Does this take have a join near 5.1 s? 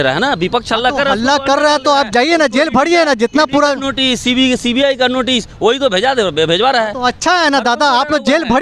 no; 0 cuts

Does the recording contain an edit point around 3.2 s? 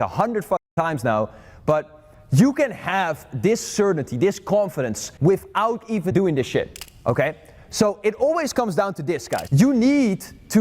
no; 4 cuts; at 5.1 s, 6.1 s, 6.8 s, 9.4 s

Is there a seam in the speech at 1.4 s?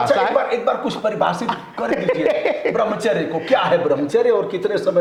no; 0 cuts

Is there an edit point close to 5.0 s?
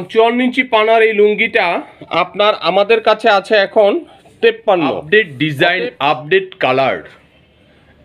yes; 1 cut; at 5.0 s

